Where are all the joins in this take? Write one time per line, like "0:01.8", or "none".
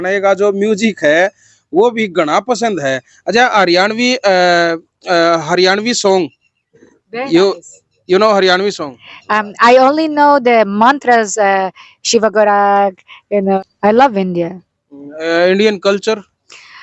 0:13.6